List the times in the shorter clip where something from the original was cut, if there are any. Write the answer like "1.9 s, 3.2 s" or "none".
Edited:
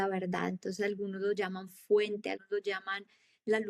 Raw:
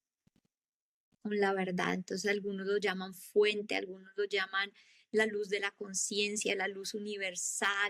2.4 s